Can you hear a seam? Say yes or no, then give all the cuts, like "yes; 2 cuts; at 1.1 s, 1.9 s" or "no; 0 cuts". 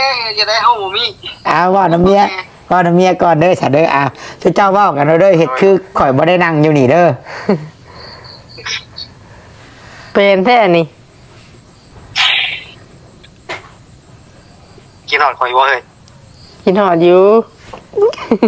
no; 0 cuts